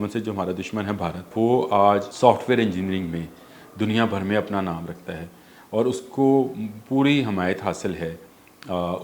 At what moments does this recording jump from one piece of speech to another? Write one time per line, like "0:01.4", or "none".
0:01.3
0:02.1